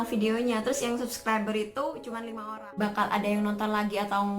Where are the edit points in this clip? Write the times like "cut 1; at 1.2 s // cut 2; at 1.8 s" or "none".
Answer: cut 1; at 2.2 s